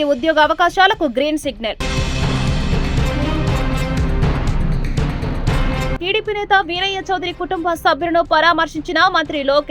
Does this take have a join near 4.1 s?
no; 0 cuts

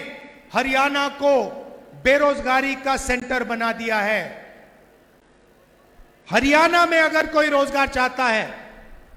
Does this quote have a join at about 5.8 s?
no; 0 cuts

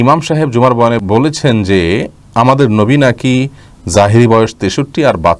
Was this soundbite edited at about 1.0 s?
yes; 1 cut; at 1.0 s

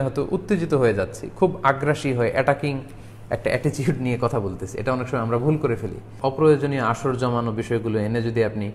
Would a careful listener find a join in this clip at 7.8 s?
no; 1 cut; at 6.1 s

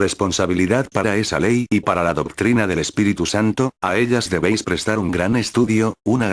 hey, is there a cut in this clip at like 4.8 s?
yes; 1 cut; at 4.8 s

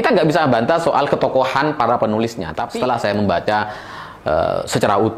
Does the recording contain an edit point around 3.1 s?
yes; 1 cut; at 3.1 s

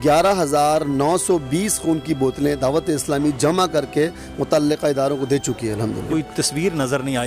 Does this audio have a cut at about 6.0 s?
yes; 1 cut; at 6.0 s

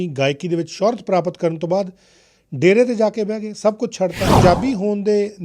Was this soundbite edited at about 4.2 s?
yes; 1 cut; at 4.2 s

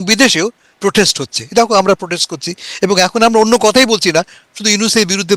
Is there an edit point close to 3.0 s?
no; 0 cuts

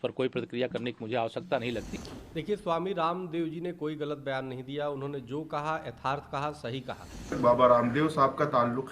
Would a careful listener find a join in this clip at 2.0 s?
yes; 2 cuts; at 2.0 s, 7.4 s

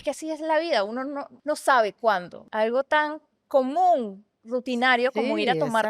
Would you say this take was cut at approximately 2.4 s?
yes; 2 cuts; at 1.3 s, 2.4 s

